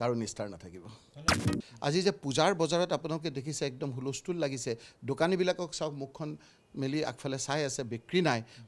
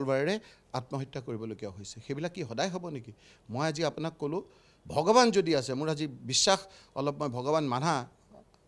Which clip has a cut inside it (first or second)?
first